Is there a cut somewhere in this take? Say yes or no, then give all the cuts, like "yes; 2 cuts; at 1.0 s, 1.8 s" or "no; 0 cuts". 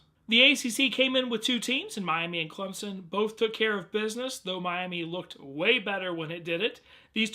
no; 0 cuts